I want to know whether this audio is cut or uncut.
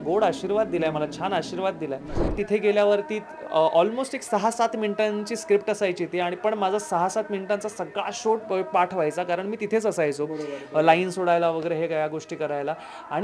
cut